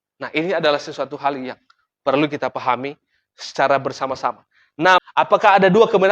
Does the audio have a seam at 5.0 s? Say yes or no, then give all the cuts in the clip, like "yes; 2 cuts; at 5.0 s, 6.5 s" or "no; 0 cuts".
yes; 1 cut; at 5.0 s